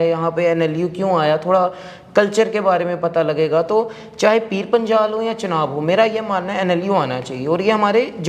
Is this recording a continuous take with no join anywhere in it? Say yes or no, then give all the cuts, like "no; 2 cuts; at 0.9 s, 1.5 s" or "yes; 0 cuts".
yes; 0 cuts